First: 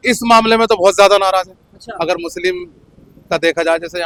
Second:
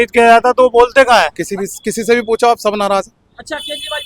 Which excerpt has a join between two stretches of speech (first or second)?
second